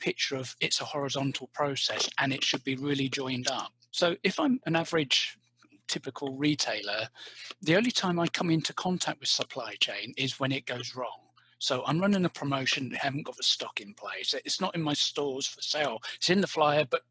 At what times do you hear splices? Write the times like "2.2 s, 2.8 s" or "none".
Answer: none